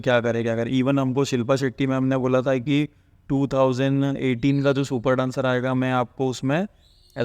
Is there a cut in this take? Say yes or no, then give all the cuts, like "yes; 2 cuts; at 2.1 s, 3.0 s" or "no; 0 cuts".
no; 0 cuts